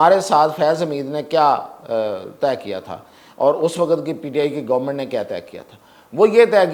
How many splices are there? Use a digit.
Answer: 0